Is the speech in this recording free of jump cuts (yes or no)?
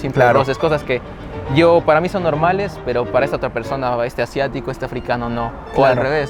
yes